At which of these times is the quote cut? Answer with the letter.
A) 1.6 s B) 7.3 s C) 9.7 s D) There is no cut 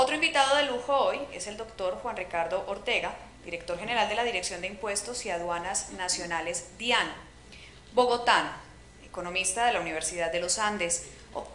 D